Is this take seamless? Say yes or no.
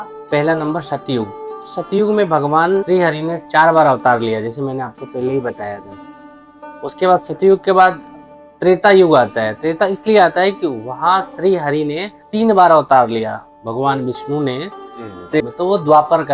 no